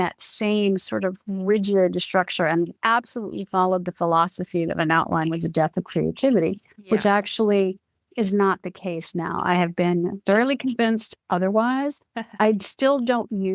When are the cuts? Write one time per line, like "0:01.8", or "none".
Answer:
none

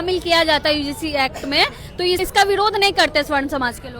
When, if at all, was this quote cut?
0:02.2

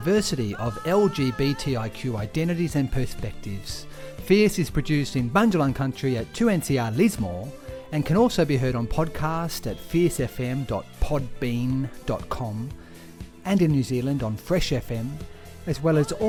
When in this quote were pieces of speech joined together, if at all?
none

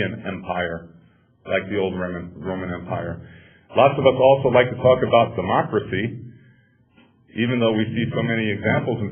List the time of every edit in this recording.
0:01.7

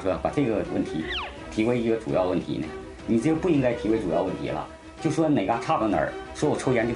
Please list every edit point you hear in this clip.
none

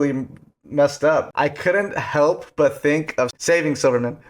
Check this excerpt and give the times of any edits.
0:01.3
0:03.4

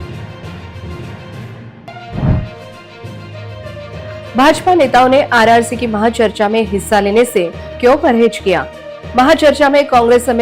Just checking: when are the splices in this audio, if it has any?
0:01.7

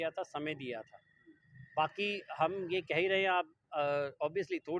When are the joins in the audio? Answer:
none

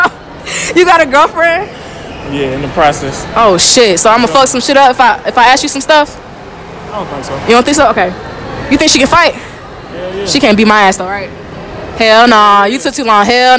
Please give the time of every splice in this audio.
none

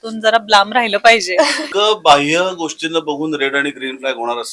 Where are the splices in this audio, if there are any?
0:01.6

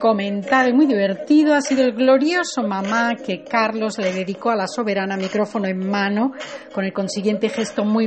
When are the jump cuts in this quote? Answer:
none

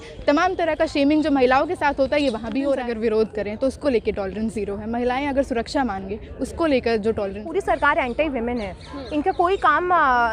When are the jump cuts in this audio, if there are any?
0:02.8
0:07.5

